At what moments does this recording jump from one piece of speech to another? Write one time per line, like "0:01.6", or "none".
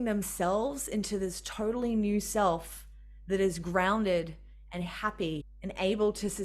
0:05.5